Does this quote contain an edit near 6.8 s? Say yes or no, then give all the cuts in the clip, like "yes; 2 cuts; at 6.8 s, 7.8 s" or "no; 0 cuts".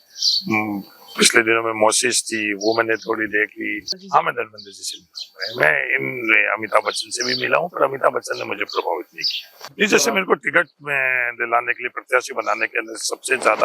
no; 2 cuts; at 3.9 s, 9.7 s